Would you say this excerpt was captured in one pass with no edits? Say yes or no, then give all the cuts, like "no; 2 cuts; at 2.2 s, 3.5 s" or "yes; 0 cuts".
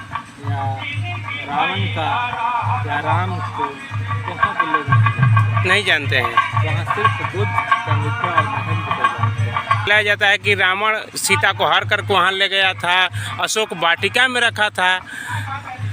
no; 1 cut; at 9.9 s